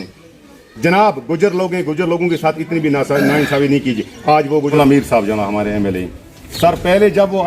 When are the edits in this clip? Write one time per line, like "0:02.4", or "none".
0:04.7